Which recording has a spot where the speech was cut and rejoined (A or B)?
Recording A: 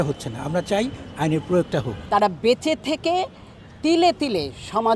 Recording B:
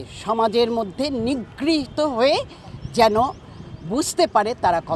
A